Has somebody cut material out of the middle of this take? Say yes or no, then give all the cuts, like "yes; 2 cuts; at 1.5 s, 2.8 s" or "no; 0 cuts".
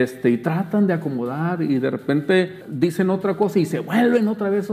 no; 0 cuts